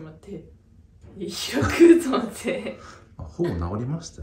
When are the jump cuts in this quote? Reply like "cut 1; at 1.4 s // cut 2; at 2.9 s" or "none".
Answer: none

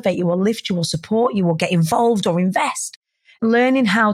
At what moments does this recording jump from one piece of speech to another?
cut 1; at 2.9 s

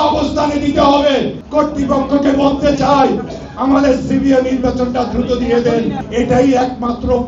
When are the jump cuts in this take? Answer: cut 1; at 1.4 s // cut 2; at 6.0 s

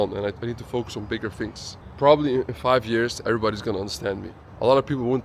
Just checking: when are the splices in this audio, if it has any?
cut 1; at 1.9 s

